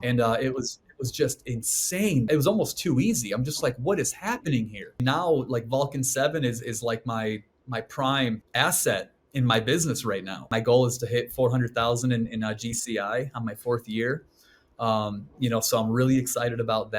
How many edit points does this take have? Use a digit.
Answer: 4